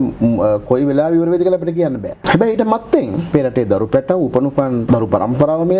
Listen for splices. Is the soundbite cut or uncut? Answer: cut